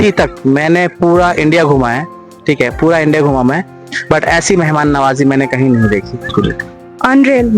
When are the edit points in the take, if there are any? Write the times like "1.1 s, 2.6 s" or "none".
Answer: 6.3 s